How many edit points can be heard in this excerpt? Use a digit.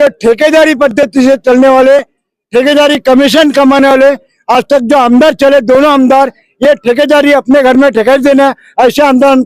0